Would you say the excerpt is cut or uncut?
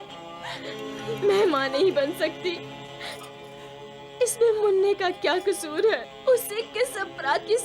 cut